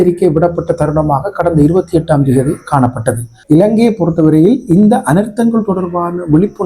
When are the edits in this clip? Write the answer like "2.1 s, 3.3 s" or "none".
3.3 s

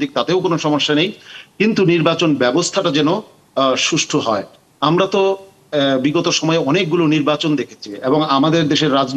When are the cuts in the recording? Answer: none

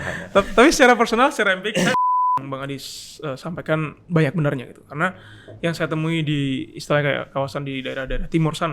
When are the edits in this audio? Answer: 2.0 s

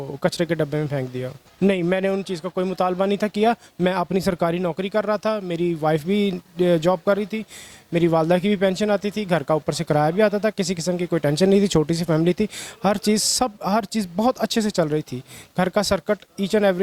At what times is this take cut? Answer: 1.4 s

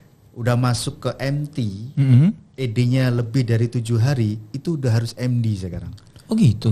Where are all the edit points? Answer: none

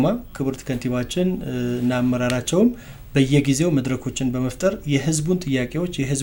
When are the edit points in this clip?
none

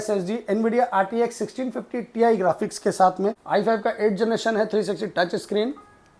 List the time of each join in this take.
3.4 s

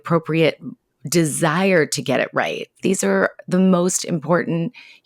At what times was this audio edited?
2.7 s

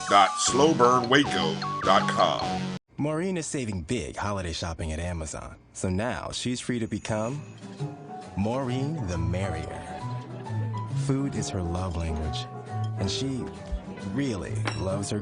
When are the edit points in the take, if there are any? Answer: 2.6 s

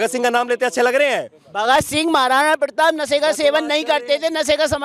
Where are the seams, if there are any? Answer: none

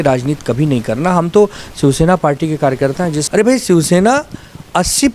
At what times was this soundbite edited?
3.2 s

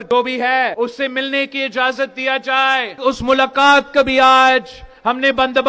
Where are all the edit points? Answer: 0.7 s, 2.9 s

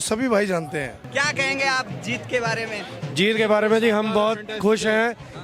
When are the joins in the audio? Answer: none

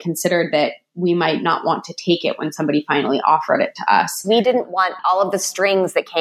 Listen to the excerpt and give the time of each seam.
4.2 s

